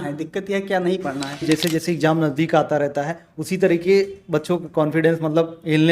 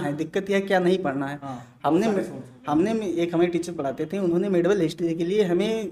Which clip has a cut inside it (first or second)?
first